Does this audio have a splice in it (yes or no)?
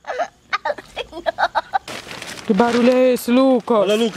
yes